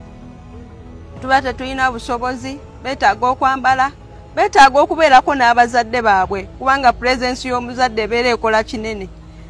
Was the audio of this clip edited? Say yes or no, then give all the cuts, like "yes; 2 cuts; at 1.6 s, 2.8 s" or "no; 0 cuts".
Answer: no; 0 cuts